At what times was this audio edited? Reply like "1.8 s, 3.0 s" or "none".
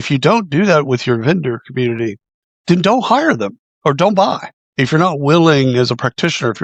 none